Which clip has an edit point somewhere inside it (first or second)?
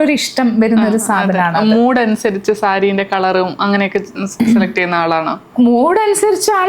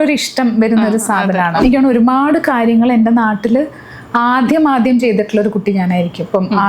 second